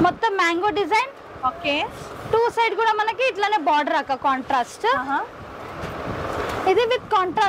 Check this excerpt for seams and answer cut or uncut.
uncut